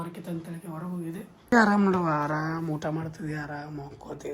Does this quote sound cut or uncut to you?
cut